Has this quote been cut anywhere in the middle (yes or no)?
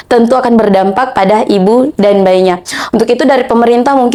no